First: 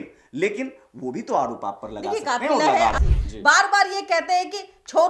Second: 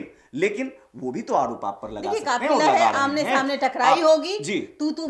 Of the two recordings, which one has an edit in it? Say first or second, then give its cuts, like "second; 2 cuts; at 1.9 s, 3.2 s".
first; 1 cut; at 3.0 s